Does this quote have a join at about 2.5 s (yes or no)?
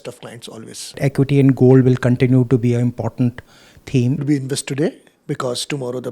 no